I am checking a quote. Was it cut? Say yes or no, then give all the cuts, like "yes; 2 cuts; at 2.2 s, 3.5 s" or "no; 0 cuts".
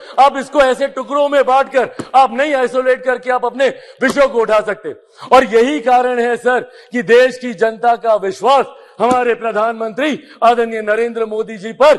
no; 0 cuts